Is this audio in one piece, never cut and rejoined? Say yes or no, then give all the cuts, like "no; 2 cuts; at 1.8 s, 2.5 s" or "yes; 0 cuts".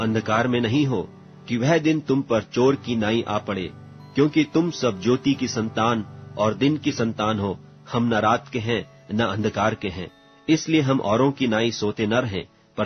no; 1 cut; at 3.6 s